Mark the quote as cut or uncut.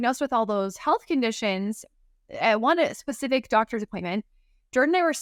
uncut